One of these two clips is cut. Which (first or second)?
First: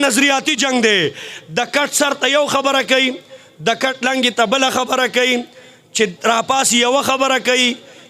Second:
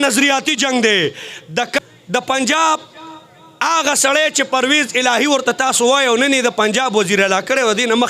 second